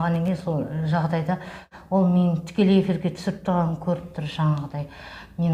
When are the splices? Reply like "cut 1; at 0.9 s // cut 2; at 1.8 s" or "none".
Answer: cut 1; at 1.7 s